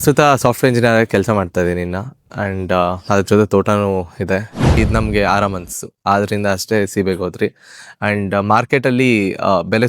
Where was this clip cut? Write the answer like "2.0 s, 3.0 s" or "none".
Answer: 4.8 s